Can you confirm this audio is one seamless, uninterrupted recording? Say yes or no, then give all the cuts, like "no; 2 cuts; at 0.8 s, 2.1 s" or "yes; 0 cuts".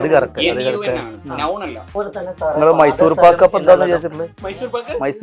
no; 1 cut; at 1.9 s